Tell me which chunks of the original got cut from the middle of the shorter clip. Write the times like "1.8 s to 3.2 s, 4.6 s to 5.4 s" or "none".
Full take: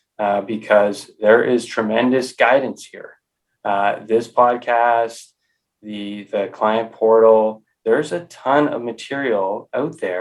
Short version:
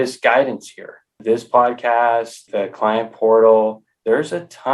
3.3 s to 4.0 s, 5.2 s to 6.2 s